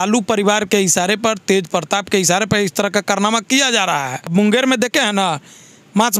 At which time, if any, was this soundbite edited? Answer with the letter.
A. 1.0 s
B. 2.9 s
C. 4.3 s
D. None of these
C